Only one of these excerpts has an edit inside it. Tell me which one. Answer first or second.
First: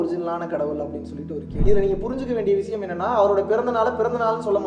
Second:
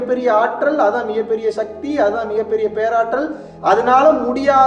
first